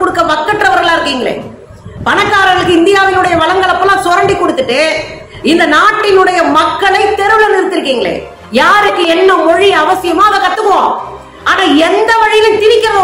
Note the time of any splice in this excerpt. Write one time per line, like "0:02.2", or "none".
0:08.3